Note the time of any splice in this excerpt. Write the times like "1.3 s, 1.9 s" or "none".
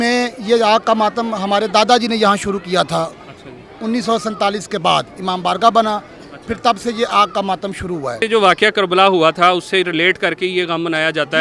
8.2 s